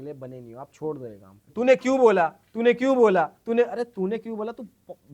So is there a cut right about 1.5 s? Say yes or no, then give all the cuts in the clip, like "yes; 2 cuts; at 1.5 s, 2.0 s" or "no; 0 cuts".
yes; 1 cut; at 1.5 s